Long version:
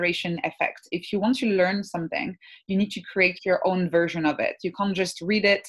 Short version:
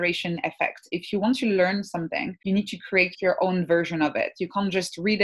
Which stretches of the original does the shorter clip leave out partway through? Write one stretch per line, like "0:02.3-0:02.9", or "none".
0:02.3-0:02.6